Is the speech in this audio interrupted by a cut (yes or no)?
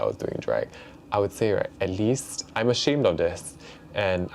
no